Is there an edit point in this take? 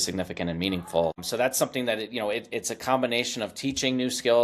yes; 1 cut; at 1.2 s

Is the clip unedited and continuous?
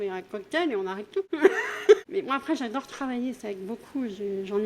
no; 2 cuts; at 1.3 s, 2.1 s

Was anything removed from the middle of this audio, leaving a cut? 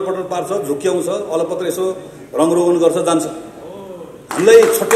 no; 0 cuts

